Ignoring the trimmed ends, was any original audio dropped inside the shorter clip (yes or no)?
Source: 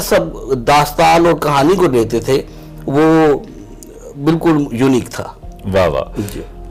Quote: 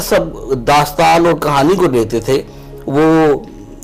no